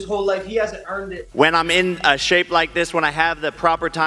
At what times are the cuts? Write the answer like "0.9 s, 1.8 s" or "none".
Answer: 1.2 s